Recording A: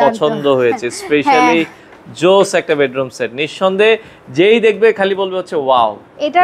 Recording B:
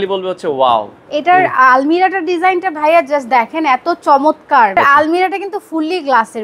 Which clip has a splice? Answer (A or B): B